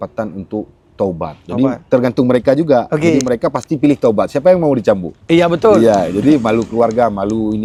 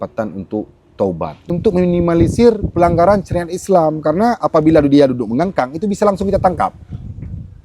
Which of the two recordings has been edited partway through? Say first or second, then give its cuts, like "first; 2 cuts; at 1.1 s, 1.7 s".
second; 1 cut; at 1.3 s